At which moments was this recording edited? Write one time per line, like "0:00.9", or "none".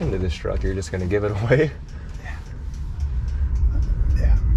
none